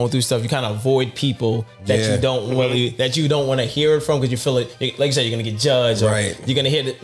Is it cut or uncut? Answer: uncut